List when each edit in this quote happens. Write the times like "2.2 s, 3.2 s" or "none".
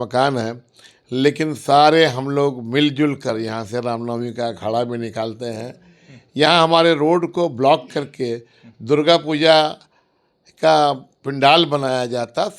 none